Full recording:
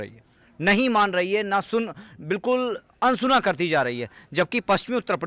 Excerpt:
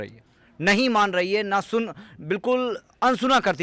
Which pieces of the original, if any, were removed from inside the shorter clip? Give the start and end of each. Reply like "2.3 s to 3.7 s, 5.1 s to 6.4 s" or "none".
none